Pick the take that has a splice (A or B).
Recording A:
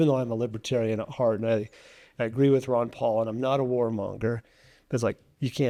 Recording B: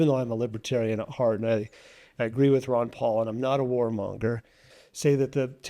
B